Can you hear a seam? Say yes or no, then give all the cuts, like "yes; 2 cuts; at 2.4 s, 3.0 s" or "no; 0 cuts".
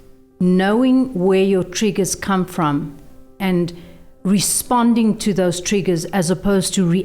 yes; 1 cut; at 3.4 s